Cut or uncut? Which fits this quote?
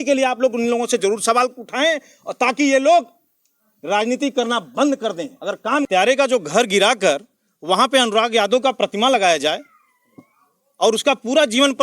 cut